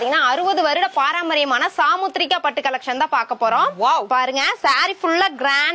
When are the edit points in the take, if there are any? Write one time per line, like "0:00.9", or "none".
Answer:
none